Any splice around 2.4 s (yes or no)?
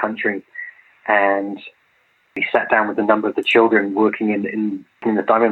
yes